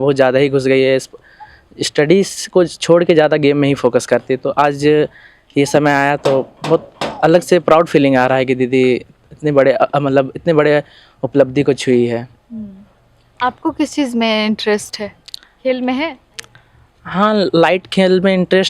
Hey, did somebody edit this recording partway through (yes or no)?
no